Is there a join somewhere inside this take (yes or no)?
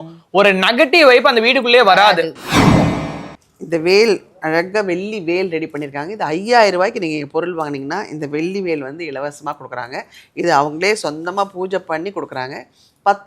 yes